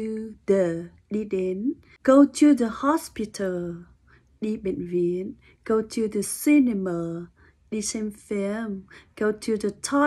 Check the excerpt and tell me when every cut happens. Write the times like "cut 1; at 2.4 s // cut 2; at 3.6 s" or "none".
cut 1; at 1.9 s